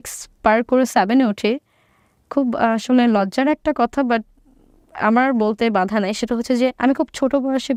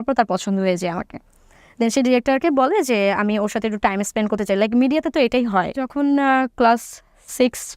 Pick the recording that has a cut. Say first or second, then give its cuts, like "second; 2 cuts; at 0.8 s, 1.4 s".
second; 1 cut; at 5.9 s